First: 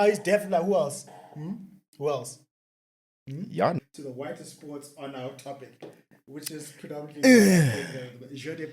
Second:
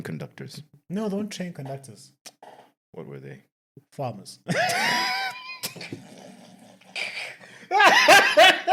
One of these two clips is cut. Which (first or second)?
first